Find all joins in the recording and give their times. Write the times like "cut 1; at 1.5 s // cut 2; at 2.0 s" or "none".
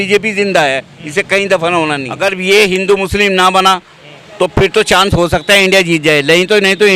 cut 1; at 2.1 s